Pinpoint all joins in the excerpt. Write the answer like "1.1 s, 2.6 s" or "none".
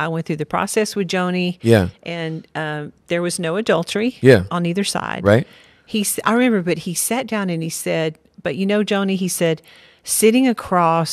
5.5 s